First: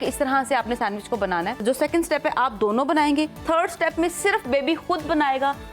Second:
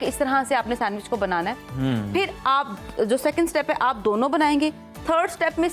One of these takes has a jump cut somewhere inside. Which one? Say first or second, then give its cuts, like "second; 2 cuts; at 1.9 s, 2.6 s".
first; 2 cuts; at 1.6 s, 3.4 s